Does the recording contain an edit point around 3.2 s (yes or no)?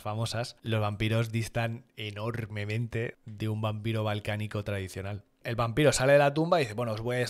yes